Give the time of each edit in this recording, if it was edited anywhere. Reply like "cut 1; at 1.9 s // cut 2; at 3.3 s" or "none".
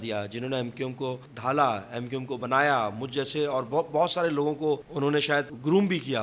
cut 1; at 1.3 s // cut 2; at 5.3 s